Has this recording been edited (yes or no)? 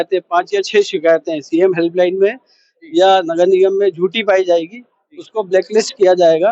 no